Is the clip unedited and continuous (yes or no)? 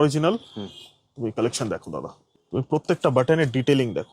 no